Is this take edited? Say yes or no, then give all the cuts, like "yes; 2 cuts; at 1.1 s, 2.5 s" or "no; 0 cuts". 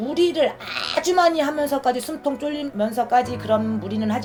no; 0 cuts